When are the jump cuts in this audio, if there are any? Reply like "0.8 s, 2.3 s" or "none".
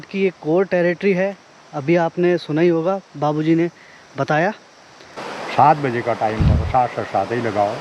5.2 s